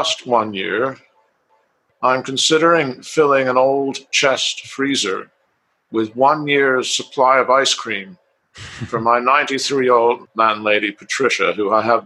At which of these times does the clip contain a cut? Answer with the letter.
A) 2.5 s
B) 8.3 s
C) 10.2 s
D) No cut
C